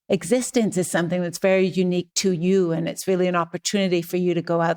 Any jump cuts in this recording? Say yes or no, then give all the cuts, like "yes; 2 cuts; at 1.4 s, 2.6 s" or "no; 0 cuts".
no; 0 cuts